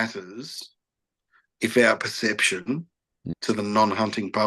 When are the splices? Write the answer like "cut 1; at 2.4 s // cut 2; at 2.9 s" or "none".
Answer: cut 1; at 3.2 s